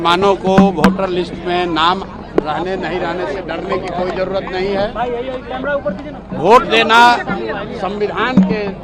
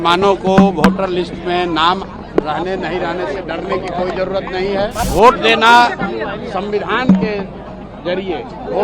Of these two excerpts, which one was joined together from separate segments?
second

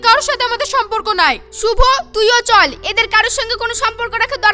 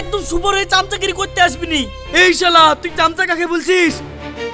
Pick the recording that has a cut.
second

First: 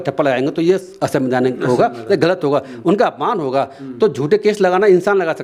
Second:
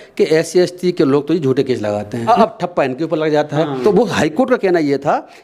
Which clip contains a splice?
second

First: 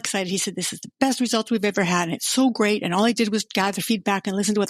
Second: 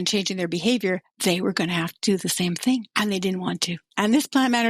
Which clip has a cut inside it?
second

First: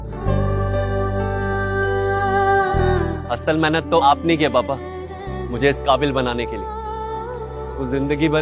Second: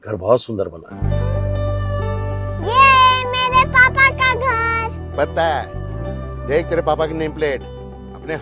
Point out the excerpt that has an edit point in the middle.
first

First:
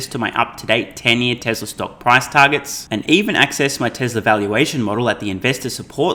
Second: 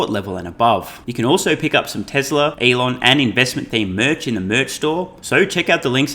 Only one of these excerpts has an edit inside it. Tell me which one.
second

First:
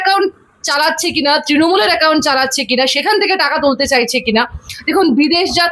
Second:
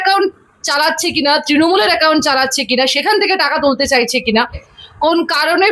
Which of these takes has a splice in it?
second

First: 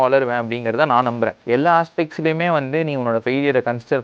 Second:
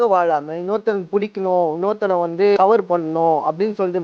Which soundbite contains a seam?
first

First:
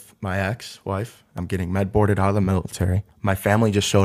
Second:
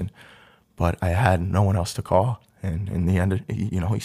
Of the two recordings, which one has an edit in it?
first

